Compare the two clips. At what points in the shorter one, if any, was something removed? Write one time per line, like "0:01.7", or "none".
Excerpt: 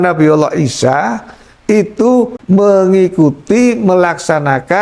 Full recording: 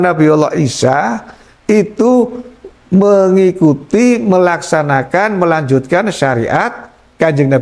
0:02.4